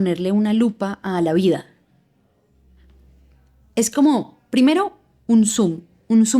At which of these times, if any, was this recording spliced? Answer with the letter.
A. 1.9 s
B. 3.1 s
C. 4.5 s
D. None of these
D